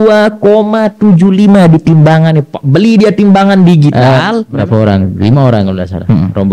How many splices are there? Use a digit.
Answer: 1